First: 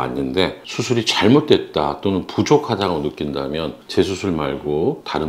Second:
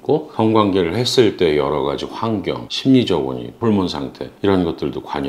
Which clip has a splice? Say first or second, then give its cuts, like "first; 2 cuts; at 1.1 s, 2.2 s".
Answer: first; 1 cut; at 3.8 s